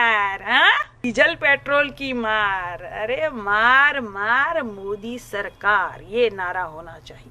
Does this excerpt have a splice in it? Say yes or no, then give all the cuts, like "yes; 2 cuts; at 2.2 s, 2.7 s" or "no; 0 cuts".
yes; 1 cut; at 1.0 s